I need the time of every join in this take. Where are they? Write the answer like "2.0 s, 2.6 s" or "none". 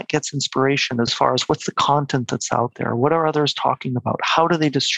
1.1 s

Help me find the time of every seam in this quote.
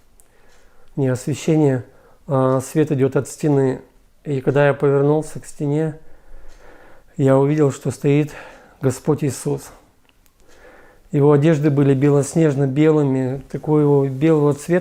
none

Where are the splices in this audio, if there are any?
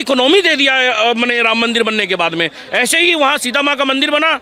none

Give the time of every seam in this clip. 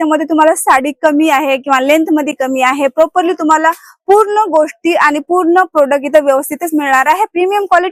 none

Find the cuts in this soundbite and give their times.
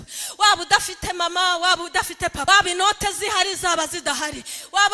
2.4 s

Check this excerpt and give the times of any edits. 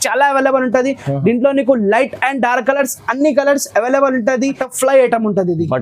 4.7 s

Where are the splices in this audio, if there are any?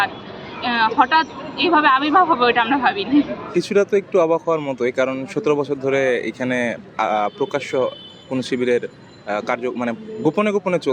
3.4 s

